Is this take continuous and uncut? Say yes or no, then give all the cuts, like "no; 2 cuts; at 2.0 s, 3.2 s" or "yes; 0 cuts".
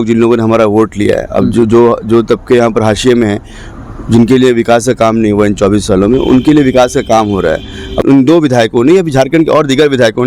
no; 1 cut; at 8.0 s